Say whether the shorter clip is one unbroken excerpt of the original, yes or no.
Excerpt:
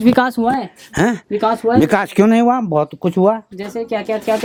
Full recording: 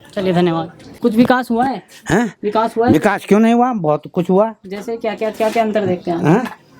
yes